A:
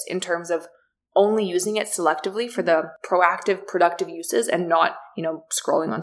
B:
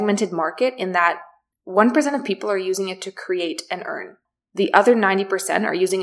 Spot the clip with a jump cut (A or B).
A